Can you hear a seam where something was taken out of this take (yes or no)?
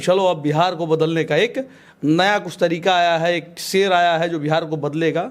no